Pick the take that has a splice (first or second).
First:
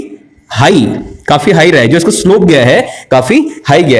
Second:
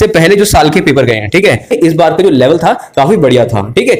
second